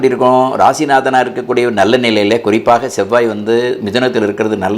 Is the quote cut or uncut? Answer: uncut